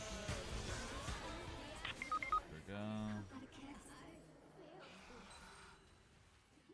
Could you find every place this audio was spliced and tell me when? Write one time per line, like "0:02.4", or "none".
none